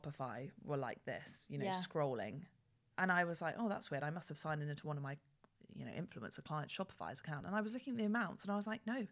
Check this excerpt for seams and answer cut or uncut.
uncut